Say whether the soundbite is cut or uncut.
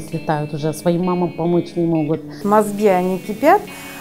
cut